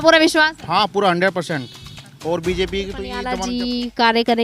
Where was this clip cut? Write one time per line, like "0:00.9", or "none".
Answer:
0:03.2